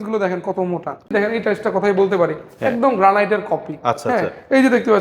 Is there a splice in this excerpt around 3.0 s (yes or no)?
no